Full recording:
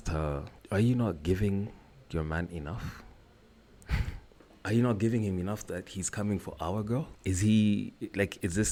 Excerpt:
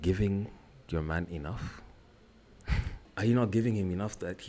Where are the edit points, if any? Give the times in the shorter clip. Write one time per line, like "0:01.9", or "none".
0:03.0